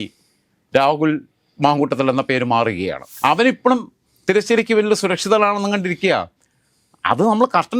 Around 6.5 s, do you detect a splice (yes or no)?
no